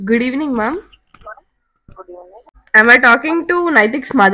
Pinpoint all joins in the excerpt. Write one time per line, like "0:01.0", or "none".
0:02.6